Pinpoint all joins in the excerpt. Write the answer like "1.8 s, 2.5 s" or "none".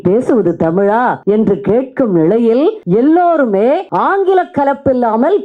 1.2 s, 2.8 s, 3.9 s